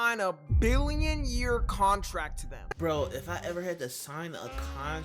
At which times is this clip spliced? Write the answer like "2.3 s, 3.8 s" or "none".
2.7 s